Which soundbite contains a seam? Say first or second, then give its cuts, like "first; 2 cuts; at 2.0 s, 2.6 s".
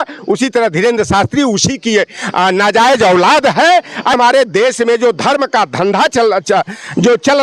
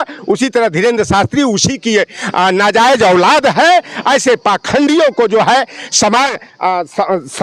first; 1 cut; at 4.1 s